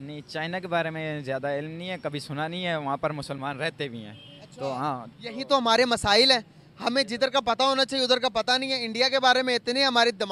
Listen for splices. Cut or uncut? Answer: uncut